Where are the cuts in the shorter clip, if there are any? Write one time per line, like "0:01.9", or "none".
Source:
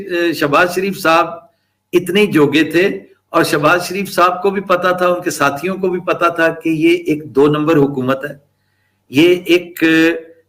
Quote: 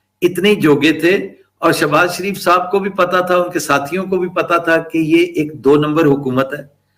none